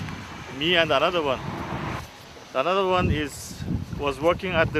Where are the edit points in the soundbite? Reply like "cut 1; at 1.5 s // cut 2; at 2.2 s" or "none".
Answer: cut 1; at 2.9 s